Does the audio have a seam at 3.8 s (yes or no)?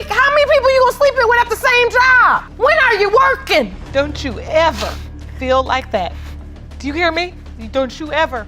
yes